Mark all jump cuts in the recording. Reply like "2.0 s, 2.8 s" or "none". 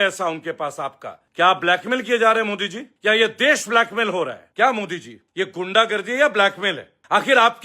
4.4 s